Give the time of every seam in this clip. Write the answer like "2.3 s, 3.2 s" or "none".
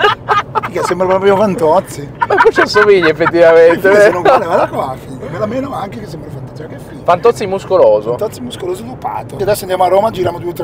none